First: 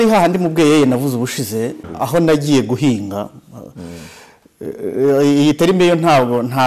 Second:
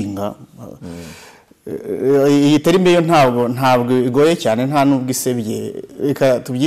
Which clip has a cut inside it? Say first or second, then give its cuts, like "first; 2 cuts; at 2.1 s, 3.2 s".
first; 1 cut; at 1.9 s